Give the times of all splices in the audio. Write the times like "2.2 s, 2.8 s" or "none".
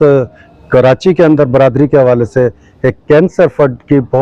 none